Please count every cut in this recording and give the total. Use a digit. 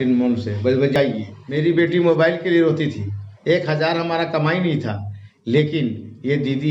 1